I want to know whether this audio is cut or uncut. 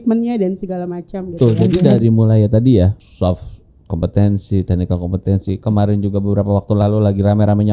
cut